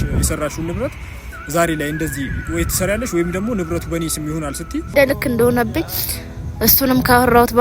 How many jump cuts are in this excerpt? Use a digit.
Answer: 1